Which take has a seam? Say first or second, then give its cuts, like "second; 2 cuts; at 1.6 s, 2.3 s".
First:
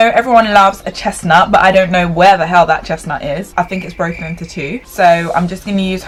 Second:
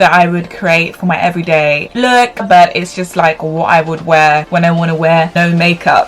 second; 1 cut; at 2.4 s